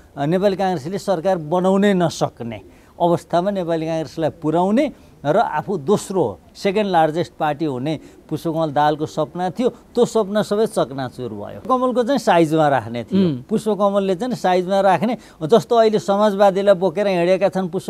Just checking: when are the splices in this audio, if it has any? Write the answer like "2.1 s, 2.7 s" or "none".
11.7 s